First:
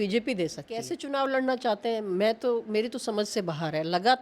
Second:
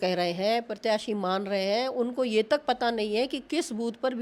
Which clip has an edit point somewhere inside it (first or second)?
first